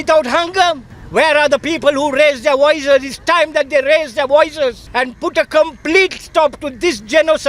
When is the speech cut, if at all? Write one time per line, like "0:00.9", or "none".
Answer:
0:00.9
0:04.8